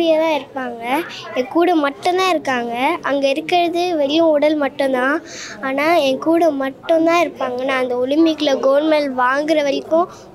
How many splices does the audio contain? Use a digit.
0